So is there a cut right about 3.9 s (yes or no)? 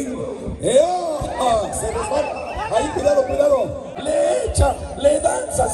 yes